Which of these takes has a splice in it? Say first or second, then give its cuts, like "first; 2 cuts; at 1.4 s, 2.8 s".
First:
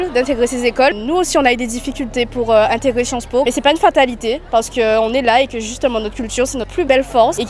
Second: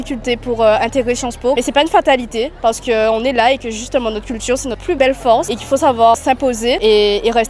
first; 1 cut; at 0.9 s